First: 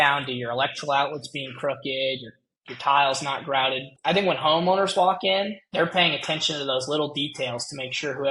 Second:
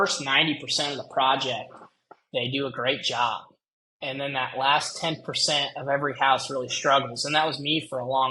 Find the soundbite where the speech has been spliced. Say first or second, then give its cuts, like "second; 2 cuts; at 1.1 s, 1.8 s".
first; 1 cut; at 3.9 s